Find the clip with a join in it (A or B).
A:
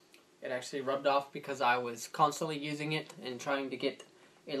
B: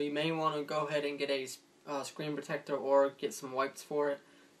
B